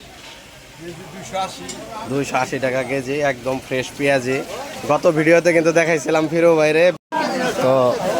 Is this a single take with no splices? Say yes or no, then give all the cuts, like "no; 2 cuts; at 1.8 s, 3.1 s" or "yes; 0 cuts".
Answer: no; 1 cut; at 6.7 s